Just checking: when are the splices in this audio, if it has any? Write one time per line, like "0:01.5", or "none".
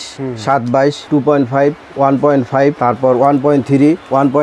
none